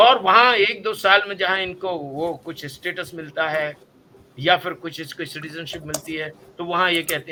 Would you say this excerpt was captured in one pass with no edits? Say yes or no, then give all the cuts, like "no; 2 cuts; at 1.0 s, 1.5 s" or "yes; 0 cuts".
yes; 0 cuts